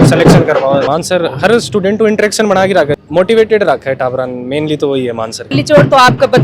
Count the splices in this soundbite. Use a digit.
3